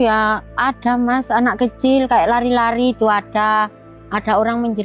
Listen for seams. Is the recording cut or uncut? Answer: uncut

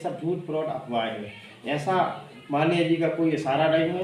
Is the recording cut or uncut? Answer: uncut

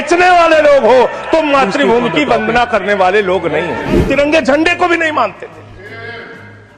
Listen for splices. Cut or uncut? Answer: cut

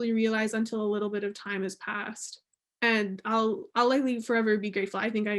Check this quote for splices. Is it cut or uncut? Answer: cut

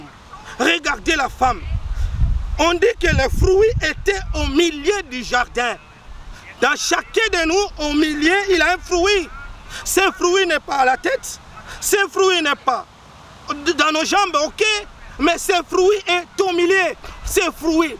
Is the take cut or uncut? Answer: uncut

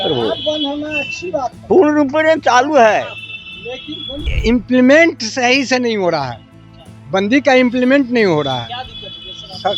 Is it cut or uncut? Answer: cut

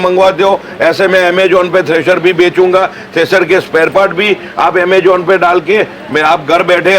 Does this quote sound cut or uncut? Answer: uncut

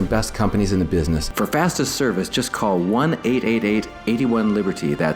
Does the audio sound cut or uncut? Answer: cut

